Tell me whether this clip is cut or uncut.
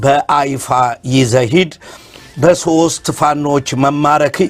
uncut